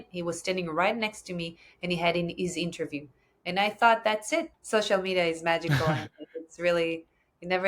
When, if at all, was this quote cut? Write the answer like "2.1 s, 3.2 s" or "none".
4.6 s